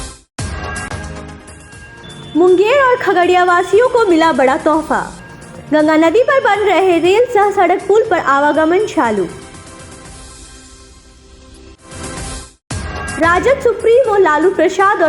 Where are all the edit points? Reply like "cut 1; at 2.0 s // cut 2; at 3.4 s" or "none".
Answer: cut 1; at 1.3 s